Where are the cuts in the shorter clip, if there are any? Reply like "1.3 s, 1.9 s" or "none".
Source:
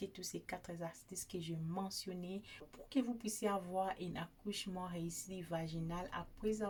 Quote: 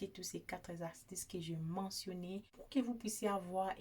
2.6 s